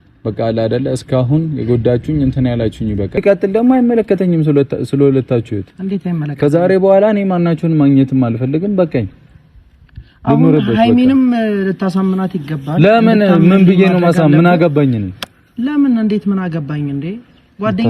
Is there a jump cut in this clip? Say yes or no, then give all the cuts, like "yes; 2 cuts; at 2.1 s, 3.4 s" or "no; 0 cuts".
yes; 1 cut; at 3.2 s